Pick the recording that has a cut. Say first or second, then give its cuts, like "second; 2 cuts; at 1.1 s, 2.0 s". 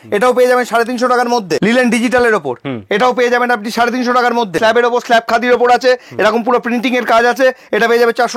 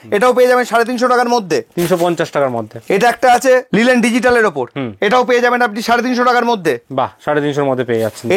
first; 2 cuts; at 1.6 s, 4.5 s